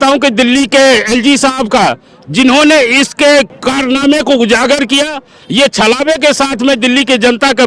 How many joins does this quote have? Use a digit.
1